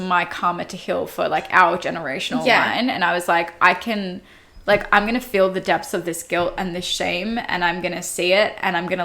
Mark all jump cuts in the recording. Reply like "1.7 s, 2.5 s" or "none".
none